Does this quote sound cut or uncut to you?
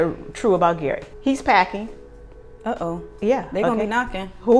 uncut